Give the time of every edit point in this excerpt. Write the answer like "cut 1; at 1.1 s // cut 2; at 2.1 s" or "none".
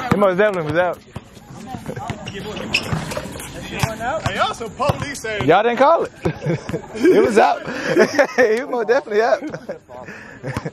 none